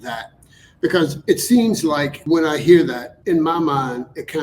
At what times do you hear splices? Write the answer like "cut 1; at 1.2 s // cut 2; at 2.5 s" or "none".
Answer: cut 1; at 2.1 s // cut 2; at 3.1 s

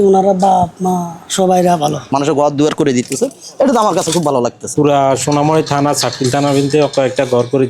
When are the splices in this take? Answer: cut 1; at 2.1 s // cut 2; at 4.7 s

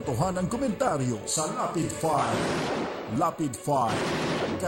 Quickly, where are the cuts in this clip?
none

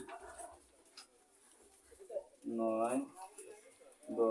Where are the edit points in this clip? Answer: none

